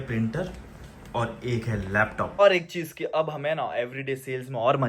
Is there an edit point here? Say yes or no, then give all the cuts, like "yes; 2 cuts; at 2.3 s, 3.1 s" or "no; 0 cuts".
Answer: yes; 1 cut; at 2.4 s